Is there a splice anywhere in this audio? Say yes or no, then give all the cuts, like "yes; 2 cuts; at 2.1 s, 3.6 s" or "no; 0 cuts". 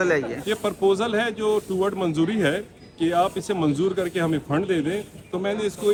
no; 0 cuts